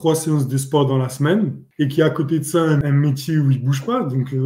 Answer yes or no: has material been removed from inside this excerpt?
yes